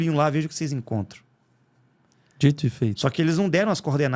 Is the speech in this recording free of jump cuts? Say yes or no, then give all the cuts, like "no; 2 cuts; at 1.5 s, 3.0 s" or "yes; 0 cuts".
yes; 0 cuts